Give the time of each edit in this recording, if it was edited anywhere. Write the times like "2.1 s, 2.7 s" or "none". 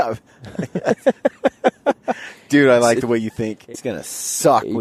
3.7 s